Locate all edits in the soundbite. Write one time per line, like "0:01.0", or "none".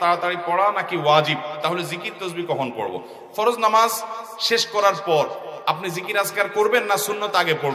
none